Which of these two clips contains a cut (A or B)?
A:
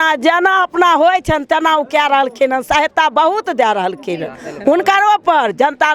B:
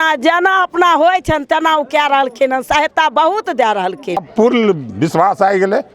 B